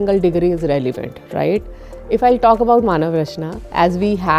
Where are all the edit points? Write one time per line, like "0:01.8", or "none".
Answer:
none

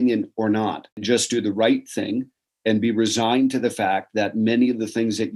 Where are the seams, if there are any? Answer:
0:01.0

